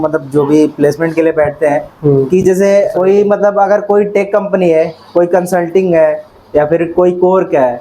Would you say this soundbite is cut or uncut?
cut